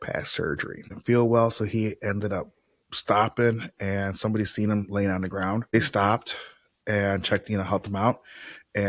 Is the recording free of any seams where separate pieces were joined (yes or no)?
no